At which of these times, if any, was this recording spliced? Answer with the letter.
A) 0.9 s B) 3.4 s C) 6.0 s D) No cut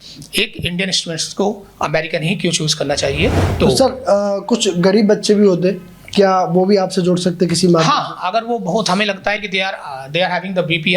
B